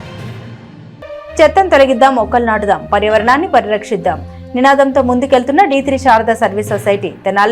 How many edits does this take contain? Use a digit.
0